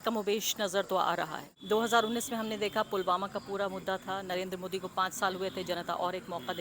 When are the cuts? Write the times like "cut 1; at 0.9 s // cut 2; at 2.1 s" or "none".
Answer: cut 1; at 1.5 s